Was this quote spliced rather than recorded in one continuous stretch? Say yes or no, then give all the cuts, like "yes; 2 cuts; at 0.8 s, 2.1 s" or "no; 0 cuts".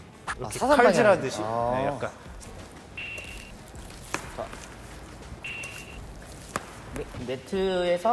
yes; 2 cuts; at 2.4 s, 7.1 s